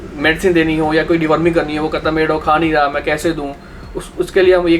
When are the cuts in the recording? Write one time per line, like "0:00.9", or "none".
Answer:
none

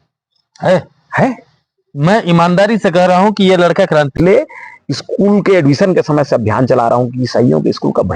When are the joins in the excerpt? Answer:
0:04.1

